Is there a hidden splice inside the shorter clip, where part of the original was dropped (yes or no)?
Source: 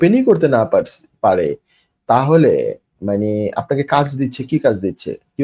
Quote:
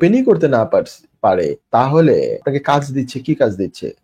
yes